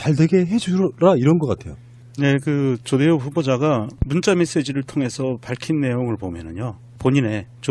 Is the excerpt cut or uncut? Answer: cut